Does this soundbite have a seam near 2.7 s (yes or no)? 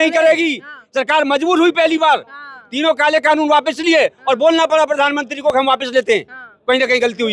no